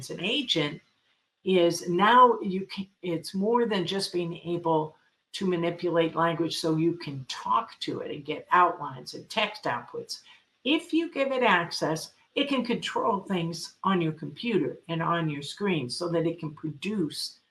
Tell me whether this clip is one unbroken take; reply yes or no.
yes